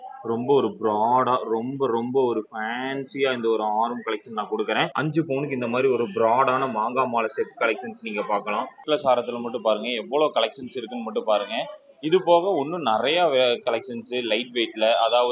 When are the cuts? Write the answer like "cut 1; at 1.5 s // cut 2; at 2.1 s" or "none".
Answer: cut 1; at 4.9 s // cut 2; at 8.8 s